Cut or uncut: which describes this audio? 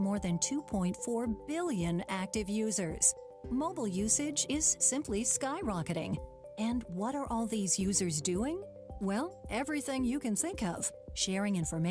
uncut